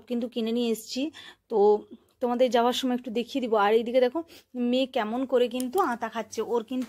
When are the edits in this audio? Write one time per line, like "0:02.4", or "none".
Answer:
none